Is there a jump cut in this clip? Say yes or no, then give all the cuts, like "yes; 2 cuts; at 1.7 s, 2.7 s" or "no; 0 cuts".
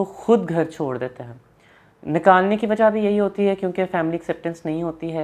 no; 0 cuts